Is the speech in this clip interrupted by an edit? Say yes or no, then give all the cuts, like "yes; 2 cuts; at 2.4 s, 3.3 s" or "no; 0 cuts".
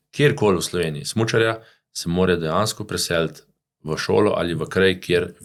no; 0 cuts